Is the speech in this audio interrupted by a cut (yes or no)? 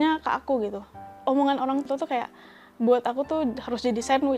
yes